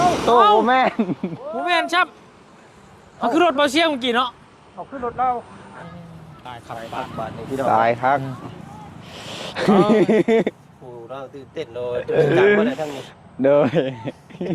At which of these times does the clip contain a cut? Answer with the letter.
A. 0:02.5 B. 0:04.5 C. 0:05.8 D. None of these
C